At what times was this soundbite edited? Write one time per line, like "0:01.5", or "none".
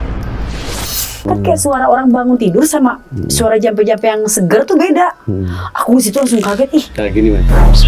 0:01.2